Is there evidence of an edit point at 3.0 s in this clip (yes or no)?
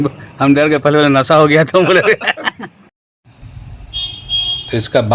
yes